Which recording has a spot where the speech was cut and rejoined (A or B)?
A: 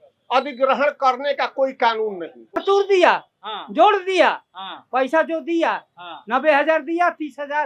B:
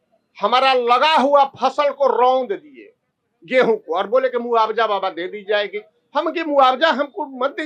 A